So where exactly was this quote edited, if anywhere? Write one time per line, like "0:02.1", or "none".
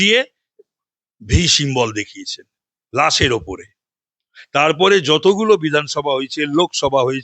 none